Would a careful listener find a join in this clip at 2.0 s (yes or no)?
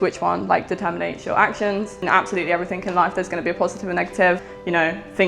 yes